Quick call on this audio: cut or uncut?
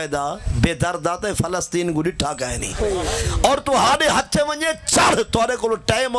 cut